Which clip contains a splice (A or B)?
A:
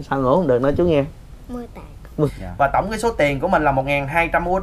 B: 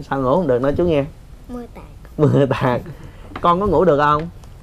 A